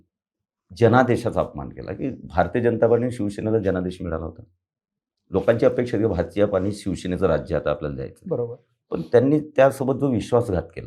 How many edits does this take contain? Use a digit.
0